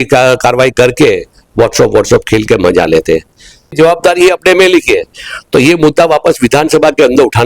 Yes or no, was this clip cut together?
yes